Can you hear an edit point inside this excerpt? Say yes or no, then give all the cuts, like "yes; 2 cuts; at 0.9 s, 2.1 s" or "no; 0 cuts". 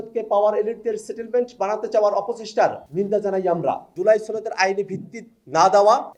yes; 1 cut; at 3.9 s